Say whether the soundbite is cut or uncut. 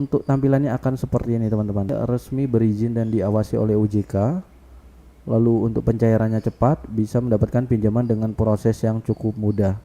cut